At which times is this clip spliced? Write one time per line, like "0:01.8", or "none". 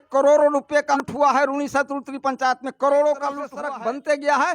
0:01.0
0:03.5